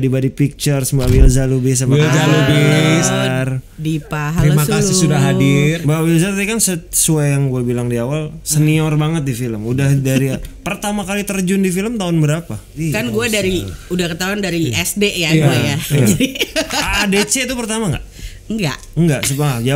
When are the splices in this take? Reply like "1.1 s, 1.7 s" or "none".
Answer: 5.8 s, 12.8 s